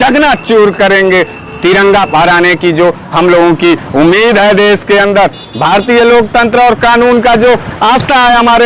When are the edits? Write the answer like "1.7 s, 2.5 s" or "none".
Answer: none